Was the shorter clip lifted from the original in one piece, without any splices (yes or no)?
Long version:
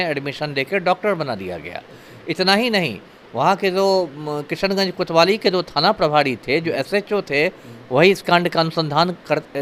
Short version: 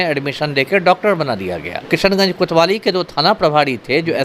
no